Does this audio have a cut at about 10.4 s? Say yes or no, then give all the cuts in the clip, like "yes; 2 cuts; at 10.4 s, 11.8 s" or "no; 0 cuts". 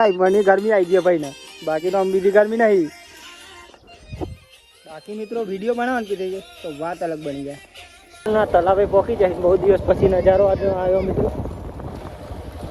no; 1 cut; at 8.3 s